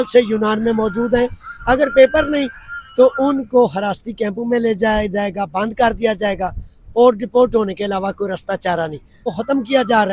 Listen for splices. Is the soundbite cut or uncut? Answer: cut